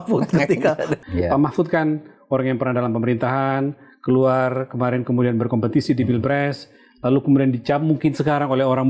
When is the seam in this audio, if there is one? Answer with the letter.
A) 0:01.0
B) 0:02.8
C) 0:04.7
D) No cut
A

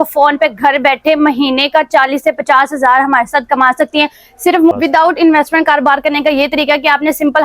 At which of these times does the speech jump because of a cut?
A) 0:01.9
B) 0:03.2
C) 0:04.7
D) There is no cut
C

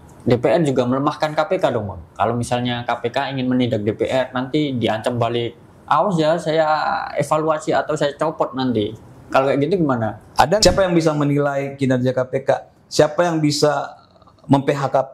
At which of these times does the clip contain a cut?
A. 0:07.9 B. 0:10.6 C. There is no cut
B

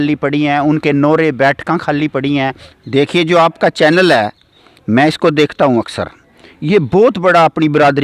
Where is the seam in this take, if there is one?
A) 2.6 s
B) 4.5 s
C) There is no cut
A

